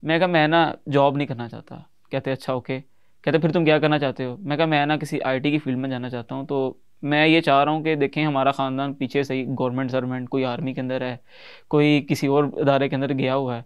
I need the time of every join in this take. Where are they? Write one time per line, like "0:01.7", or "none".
none